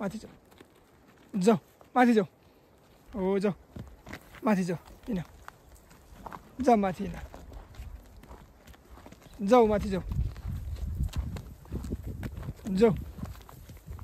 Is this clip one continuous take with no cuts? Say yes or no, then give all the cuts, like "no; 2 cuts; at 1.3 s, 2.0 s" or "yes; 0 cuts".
yes; 0 cuts